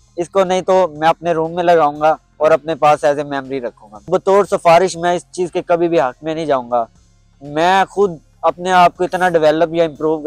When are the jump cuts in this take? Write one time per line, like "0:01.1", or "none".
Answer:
0:04.1